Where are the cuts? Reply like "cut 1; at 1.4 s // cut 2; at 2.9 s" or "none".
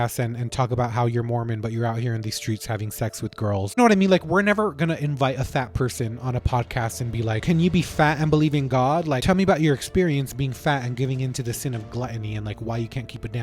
cut 1; at 3.8 s // cut 2; at 7.4 s // cut 3; at 9.2 s